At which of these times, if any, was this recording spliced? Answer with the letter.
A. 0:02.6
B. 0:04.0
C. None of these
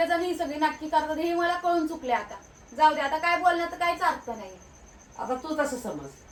C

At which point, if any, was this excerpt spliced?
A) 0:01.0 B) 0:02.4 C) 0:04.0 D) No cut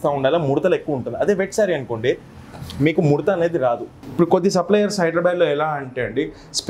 C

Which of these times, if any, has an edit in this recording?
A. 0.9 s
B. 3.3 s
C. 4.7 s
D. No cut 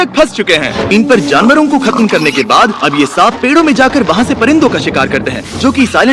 A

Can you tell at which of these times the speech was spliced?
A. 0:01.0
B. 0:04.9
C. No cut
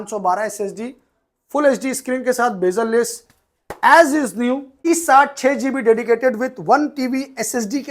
B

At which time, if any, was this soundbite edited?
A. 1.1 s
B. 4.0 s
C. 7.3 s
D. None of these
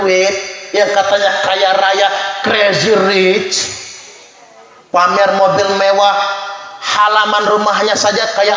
D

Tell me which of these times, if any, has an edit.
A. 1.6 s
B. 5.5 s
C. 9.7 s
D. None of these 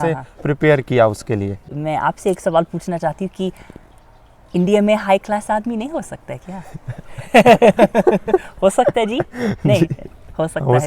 A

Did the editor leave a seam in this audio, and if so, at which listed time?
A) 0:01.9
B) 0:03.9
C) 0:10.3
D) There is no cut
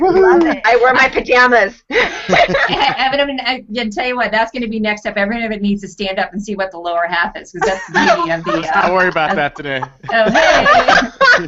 D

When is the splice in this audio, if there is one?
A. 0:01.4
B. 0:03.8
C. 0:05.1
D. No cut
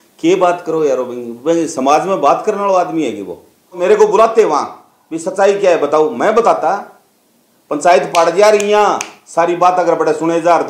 B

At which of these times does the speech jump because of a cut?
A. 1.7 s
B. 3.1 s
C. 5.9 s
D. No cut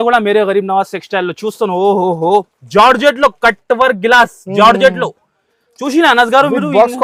D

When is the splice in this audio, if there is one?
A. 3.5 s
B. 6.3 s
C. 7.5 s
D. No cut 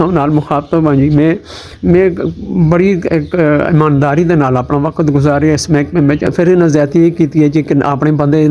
B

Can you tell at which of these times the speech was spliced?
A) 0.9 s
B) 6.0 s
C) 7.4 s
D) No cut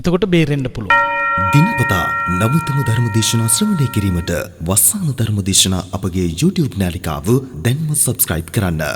A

